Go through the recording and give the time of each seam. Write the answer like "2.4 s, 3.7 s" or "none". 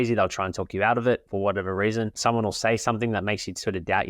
1.3 s, 2.2 s